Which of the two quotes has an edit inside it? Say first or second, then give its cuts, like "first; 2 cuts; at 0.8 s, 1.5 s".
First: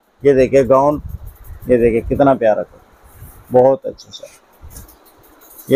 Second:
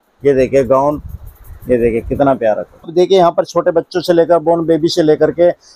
second; 1 cut; at 2.9 s